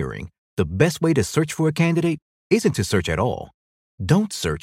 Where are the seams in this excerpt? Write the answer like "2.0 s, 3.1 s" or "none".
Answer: none